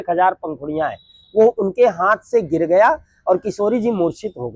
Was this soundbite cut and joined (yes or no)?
no